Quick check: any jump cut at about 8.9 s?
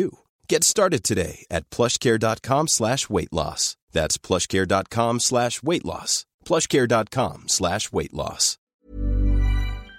yes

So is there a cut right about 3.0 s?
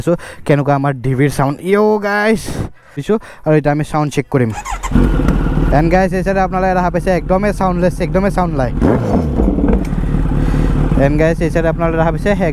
no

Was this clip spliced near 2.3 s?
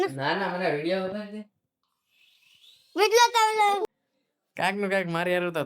no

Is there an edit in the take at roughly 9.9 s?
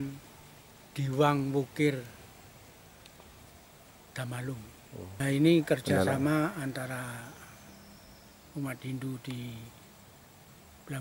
no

